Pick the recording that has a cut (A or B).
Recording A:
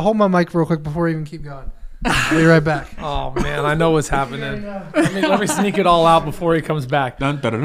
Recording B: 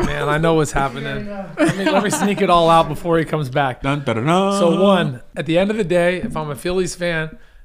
B